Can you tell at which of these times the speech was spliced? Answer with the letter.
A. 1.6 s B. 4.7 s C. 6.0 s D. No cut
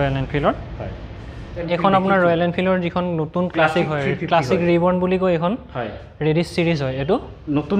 A